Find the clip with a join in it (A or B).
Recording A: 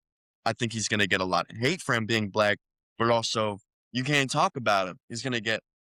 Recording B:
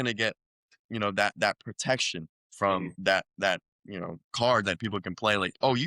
B